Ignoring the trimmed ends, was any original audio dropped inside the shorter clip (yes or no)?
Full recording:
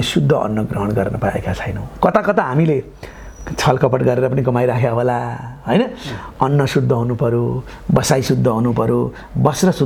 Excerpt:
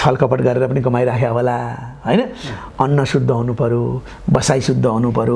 no